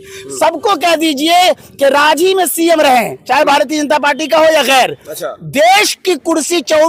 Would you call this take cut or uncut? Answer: uncut